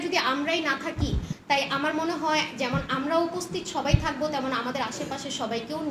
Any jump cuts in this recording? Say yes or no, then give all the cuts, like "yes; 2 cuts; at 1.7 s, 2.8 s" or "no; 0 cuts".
yes; 1 cut; at 1.3 s